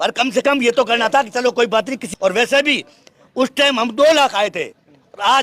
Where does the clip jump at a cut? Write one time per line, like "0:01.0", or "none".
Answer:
0:02.1

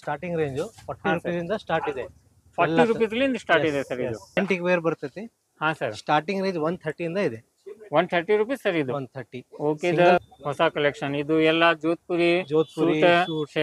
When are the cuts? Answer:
0:04.4
0:10.3

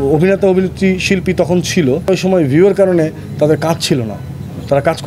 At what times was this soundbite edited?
0:02.1

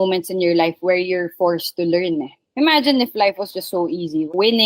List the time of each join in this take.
none

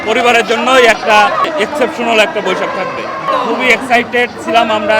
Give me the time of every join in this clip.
0:03.3

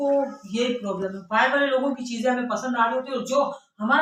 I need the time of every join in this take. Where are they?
none

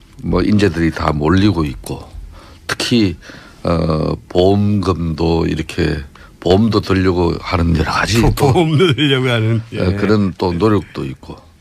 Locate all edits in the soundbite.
0:10.2

